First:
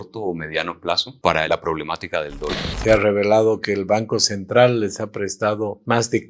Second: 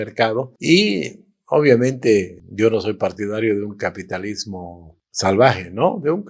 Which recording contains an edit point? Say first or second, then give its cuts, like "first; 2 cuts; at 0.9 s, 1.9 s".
first; 2 cuts; at 1.1 s, 2.6 s